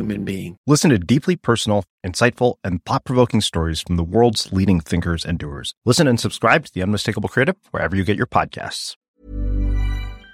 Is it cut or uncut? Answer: cut